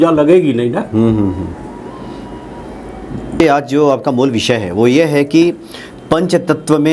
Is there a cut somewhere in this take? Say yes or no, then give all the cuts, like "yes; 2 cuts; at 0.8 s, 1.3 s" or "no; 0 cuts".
yes; 1 cut; at 3.4 s